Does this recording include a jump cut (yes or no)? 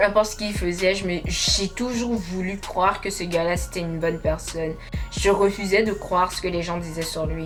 no